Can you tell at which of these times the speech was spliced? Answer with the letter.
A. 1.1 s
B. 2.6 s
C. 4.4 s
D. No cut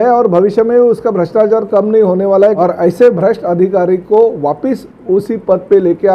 B